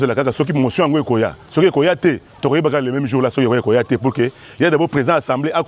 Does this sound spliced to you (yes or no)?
no